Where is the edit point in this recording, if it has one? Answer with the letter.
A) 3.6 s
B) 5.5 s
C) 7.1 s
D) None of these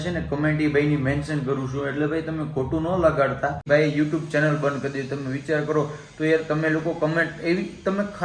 A